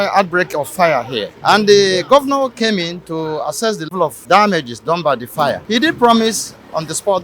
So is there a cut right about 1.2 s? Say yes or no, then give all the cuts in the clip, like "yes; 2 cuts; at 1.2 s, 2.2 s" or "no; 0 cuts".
yes; 3 cuts; at 1.2 s, 3.9 s, 5.6 s